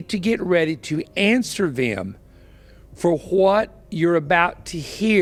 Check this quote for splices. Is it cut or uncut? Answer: uncut